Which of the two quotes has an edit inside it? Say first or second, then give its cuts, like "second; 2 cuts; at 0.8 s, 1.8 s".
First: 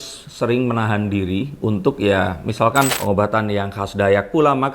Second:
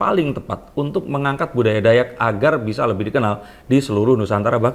first; 1 cut; at 2.9 s